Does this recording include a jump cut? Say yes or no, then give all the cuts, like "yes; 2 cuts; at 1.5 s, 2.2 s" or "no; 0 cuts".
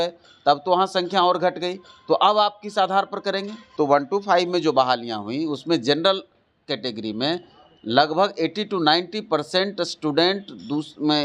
yes; 1 cut; at 3.6 s